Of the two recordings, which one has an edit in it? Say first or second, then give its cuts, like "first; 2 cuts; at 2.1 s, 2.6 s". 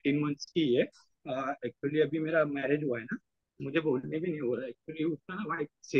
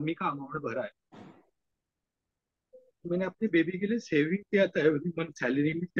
second; 1 cut; at 1.0 s